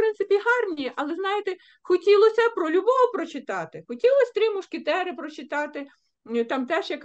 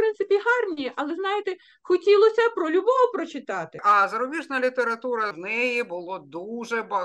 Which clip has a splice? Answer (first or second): second